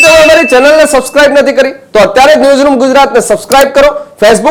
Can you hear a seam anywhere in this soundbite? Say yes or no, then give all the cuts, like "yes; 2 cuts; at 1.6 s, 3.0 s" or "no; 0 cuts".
no; 0 cuts